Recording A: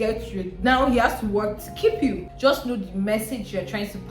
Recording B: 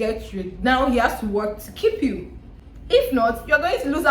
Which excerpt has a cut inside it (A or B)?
A